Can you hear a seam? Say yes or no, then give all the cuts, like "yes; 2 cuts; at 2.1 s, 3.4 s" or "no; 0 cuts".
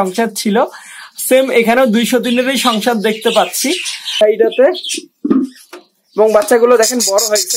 yes; 1 cut; at 4.2 s